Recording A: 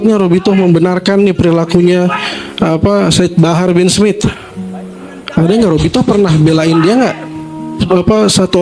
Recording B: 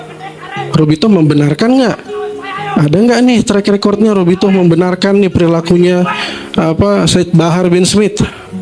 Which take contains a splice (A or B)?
A